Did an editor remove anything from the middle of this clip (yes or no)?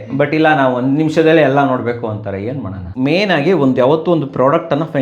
yes